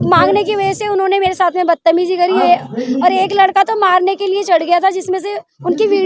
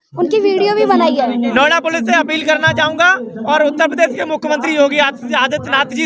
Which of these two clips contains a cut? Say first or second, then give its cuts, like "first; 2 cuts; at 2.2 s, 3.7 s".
second; 1 cut; at 1.5 s